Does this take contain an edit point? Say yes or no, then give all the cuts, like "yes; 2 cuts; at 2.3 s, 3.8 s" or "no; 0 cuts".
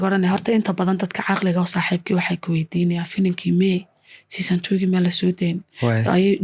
no; 0 cuts